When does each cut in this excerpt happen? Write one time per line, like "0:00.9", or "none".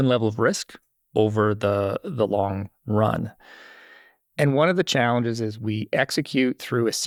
none